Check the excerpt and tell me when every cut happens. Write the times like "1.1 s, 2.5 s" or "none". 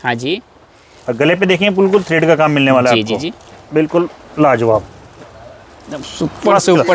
none